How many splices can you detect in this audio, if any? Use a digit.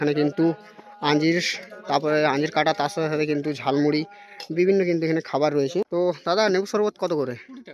1